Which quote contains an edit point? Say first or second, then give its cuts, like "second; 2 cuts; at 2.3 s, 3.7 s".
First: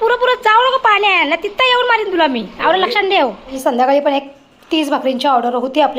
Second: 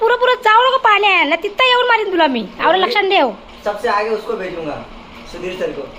first; 1 cut; at 3.6 s